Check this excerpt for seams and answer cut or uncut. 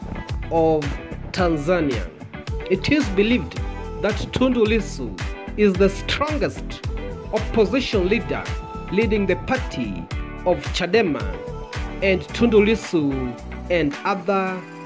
uncut